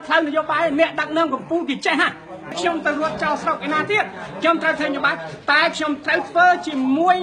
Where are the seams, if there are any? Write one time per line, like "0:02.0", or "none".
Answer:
0:02.6